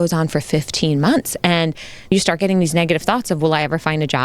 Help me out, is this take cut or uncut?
cut